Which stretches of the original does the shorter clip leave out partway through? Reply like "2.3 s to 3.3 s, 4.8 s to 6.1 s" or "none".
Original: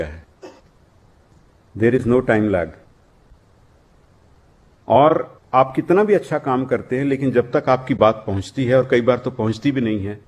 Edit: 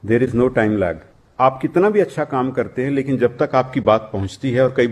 2.9 s to 5.4 s